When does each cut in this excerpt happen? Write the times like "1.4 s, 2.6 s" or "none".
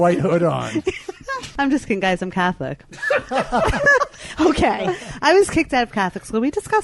1.4 s